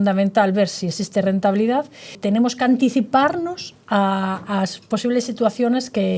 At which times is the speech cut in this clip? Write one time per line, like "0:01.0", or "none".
0:02.2